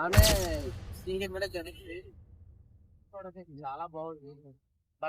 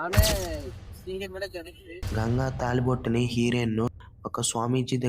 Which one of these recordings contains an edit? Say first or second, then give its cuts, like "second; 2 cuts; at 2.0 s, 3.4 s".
second; 1 cut; at 2.0 s